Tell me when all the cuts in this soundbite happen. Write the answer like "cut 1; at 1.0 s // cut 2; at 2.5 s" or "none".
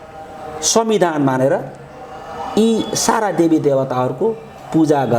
none